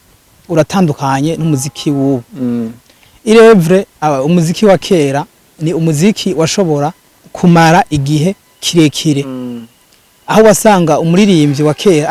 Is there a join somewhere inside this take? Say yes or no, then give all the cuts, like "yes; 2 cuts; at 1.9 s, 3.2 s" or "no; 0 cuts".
no; 0 cuts